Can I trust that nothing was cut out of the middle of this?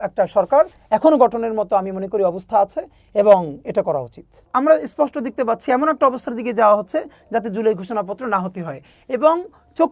no; 1 cut; at 4.5 s

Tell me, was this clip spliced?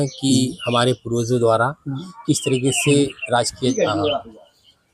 yes; 1 cut; at 3.6 s

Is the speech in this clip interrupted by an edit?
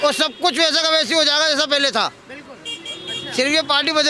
no; 0 cuts

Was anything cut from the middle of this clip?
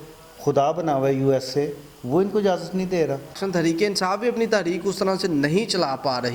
yes; 1 cut; at 3.4 s

